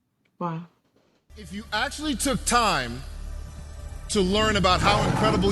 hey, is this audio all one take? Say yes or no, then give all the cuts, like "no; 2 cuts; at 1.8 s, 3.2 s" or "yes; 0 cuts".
no; 1 cut; at 1.4 s